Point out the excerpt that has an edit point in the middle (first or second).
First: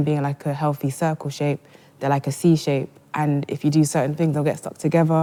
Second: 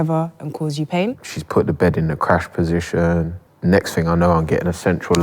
second